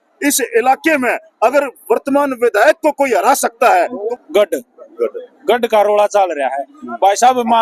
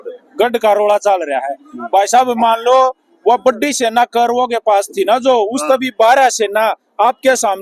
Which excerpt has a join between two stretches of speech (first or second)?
first